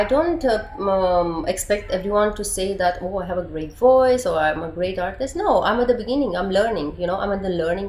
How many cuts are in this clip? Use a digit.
0